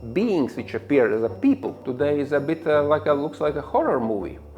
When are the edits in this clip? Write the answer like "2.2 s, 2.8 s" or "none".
1.8 s